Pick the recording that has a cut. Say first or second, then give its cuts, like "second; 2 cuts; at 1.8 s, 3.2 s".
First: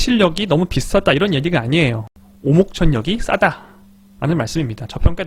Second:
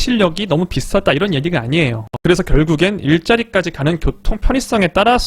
second; 1 cut; at 2.1 s